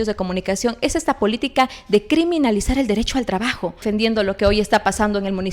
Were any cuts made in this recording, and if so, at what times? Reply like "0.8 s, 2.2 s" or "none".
3.8 s